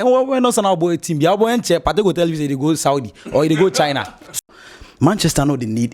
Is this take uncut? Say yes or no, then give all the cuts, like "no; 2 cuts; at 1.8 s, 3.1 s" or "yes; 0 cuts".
no; 1 cut; at 4.4 s